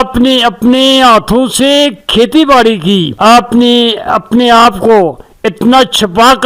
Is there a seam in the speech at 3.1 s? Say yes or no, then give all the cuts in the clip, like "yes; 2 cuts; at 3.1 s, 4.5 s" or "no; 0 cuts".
yes; 1 cut; at 3.1 s